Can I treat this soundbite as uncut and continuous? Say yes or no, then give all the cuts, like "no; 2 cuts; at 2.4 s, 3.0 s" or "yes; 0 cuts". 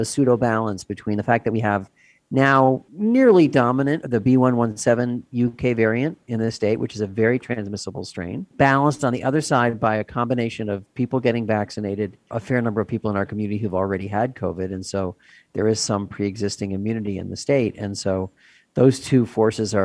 yes; 0 cuts